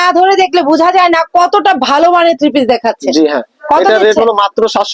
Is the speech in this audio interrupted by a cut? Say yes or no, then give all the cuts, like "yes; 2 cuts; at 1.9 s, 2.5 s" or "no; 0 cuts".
no; 0 cuts